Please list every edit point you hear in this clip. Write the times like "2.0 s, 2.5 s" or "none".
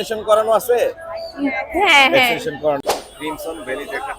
2.8 s